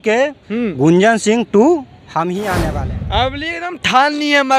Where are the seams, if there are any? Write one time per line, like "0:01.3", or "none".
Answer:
0:02.8